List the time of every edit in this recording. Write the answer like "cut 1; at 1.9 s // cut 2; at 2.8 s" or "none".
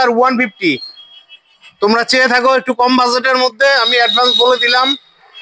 none